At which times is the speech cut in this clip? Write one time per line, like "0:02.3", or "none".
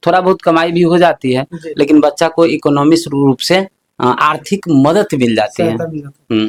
none